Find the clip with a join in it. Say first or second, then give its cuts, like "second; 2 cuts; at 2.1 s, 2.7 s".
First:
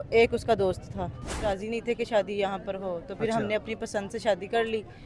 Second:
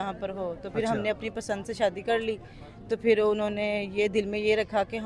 first; 1 cut; at 1.5 s